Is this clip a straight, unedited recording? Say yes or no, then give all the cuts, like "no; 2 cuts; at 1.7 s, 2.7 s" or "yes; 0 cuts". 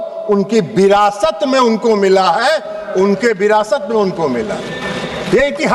yes; 0 cuts